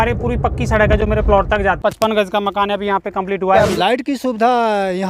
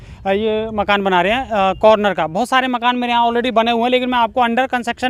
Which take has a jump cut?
first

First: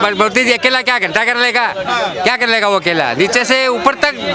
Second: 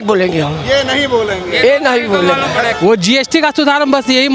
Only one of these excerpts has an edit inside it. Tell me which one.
second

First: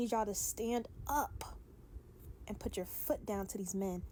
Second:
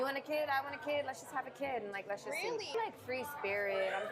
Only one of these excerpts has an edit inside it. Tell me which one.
second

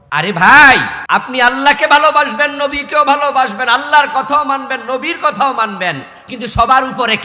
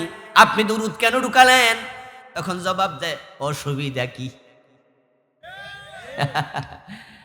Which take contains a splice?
first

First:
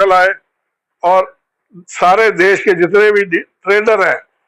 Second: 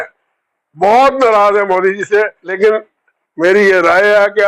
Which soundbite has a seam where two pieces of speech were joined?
second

